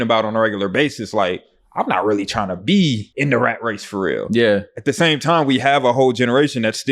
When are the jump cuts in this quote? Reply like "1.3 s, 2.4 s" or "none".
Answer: 3.1 s